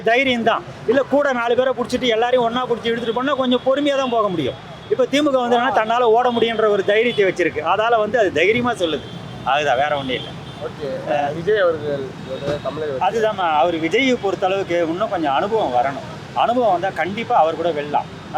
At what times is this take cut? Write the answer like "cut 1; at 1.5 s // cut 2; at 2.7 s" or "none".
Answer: none